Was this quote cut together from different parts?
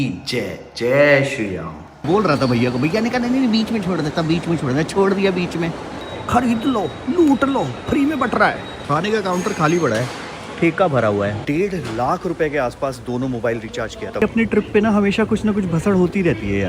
yes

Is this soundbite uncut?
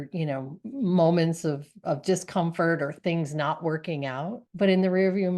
no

